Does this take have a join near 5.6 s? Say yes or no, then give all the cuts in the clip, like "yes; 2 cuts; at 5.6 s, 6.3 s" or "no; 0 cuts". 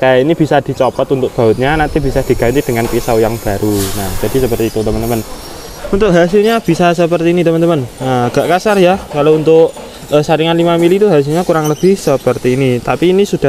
yes; 1 cut; at 5.6 s